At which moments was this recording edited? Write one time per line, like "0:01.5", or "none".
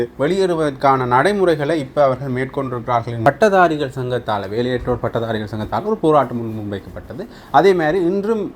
0:03.3